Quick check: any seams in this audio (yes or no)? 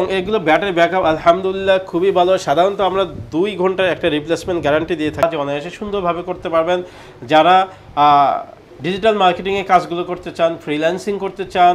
yes